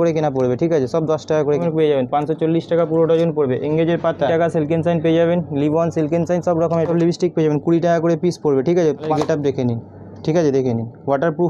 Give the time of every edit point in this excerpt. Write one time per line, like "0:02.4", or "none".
0:01.6
0:04.3
0:06.9
0:09.1

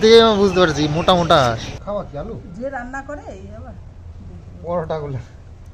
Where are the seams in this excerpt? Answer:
0:01.7

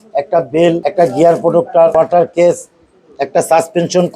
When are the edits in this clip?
0:00.8
0:01.9

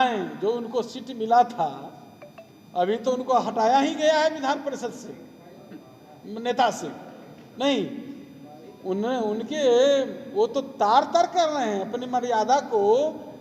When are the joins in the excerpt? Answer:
none

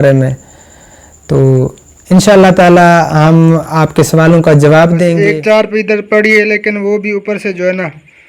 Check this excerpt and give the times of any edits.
0:05.2

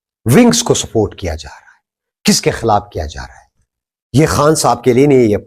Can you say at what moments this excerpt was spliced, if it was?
none

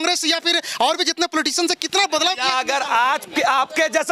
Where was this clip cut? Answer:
none

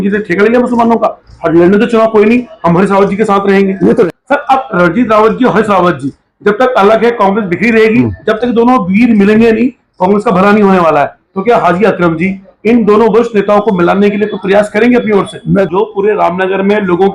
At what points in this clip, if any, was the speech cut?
0:04.1
0:08.1
0:15.7

